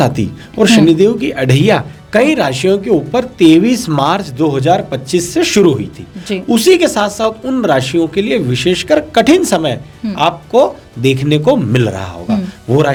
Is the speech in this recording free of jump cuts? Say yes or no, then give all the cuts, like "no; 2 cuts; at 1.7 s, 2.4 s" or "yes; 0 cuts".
yes; 0 cuts